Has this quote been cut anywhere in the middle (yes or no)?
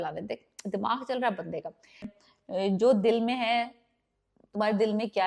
yes